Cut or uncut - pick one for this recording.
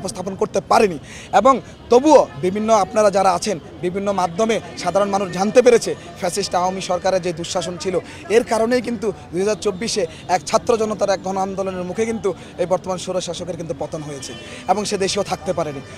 uncut